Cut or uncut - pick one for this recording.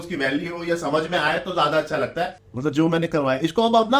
cut